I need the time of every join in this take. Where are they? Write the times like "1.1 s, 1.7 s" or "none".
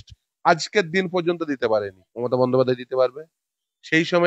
2.0 s